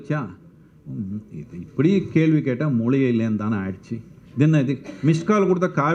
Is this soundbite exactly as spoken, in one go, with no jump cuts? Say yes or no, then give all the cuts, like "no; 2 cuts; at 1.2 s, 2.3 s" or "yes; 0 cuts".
yes; 0 cuts